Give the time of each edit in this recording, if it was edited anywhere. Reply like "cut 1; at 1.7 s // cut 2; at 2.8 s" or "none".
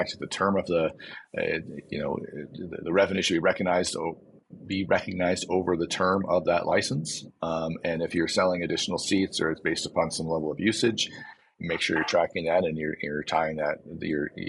none

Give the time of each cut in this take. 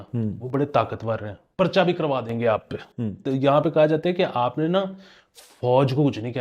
cut 1; at 1.4 s // cut 2; at 3.2 s

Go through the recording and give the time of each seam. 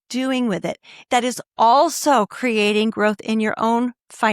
cut 1; at 1.1 s

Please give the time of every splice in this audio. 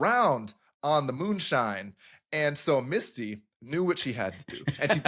none

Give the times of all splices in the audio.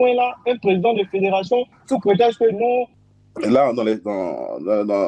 cut 1; at 3.0 s

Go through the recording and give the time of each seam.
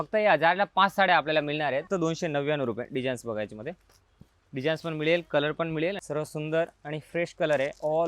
cut 1; at 1.9 s // cut 2; at 6.0 s

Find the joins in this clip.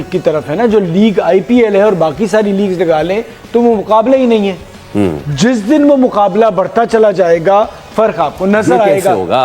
none

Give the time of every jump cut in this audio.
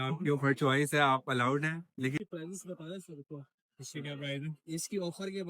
cut 1; at 2.2 s

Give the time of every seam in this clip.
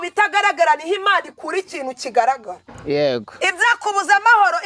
cut 1; at 3.3 s

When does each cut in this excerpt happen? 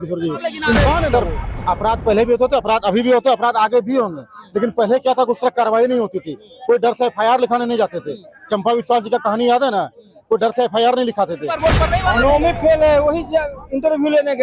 cut 1; at 1.1 s // cut 2; at 11.5 s

